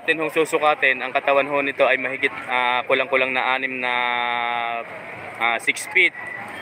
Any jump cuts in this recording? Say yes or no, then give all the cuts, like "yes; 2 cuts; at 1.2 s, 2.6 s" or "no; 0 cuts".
no; 0 cuts